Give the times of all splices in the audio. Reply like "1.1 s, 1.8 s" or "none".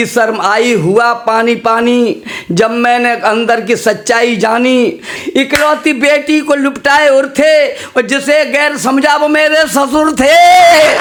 none